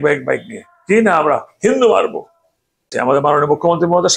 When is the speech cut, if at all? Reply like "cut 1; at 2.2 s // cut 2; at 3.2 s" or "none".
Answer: cut 1; at 2.9 s